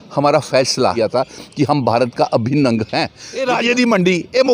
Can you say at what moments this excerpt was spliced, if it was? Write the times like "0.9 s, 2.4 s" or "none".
1.0 s, 3.5 s

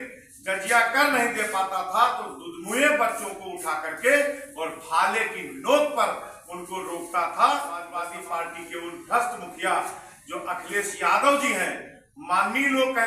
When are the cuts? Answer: 8.0 s

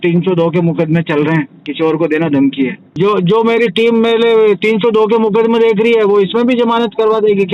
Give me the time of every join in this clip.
1.6 s, 2.8 s

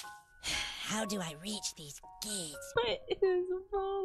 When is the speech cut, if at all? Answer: 2.5 s

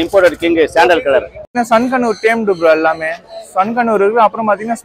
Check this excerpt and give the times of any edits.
1.6 s

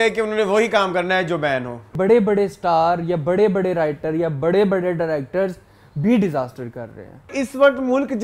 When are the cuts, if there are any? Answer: 1.9 s, 7.3 s

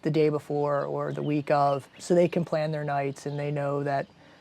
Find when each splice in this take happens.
1.9 s

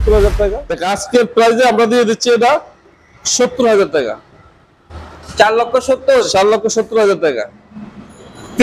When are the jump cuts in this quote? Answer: 0.9 s

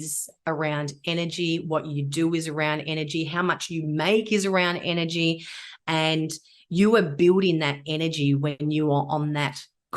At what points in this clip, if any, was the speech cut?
8.6 s

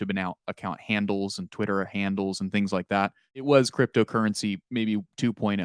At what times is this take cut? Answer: 3.4 s

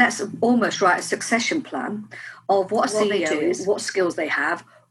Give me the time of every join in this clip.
3.3 s

